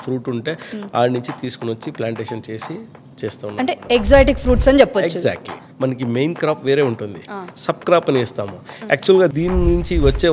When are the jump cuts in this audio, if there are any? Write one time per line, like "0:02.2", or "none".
0:05.5
0:09.3